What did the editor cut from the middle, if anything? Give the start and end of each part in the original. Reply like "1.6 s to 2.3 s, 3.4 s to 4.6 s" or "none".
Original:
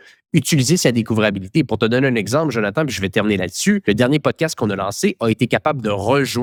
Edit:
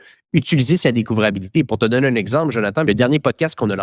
2.8 s to 3.8 s

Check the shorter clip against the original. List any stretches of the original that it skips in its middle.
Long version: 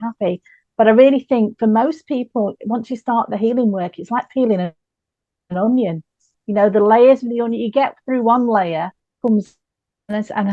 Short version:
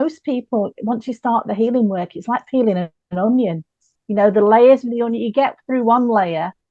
4.8 s to 5.4 s

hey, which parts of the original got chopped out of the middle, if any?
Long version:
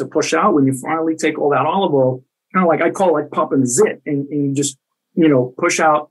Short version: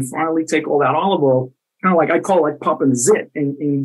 none

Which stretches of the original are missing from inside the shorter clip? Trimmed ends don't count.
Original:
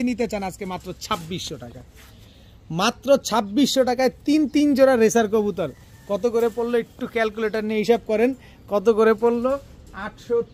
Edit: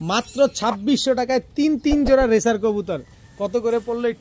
none

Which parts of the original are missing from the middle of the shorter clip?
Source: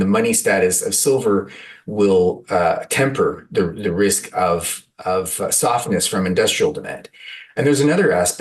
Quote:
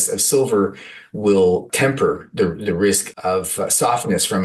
2.4 s to 2.9 s, 4.2 s to 4.9 s

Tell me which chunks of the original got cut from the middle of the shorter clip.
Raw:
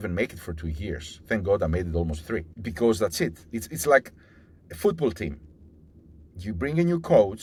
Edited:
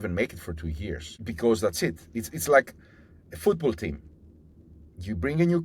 1.1 s to 2.5 s

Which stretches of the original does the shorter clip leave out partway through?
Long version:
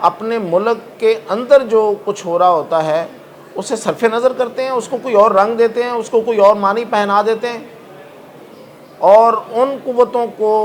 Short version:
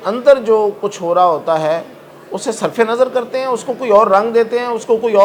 none

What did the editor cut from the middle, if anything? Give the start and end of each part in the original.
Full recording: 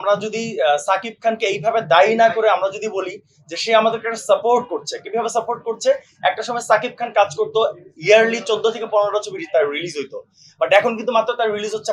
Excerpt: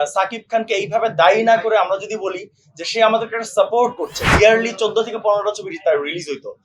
4.9 s to 7.9 s

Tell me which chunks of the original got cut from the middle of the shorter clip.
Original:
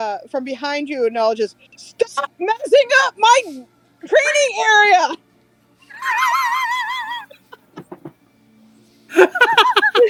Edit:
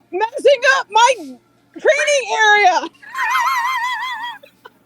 5.3 s to 5.9 s

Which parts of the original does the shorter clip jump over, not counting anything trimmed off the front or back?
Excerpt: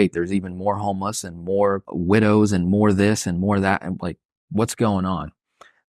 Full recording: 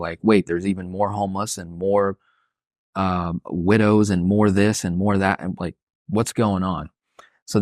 2.2 s to 3.5 s

